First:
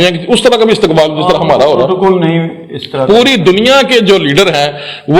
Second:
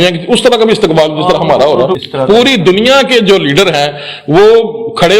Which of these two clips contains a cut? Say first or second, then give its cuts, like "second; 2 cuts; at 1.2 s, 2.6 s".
second; 1 cut; at 2.0 s